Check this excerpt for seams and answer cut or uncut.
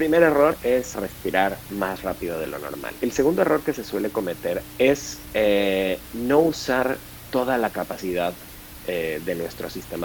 cut